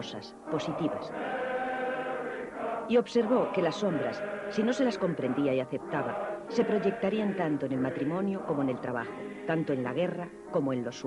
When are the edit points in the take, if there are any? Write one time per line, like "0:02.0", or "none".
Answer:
0:04.9